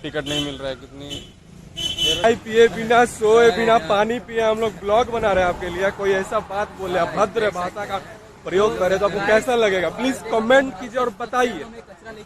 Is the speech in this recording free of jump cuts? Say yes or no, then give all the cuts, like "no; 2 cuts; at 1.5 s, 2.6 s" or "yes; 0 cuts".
no; 1 cut; at 2.2 s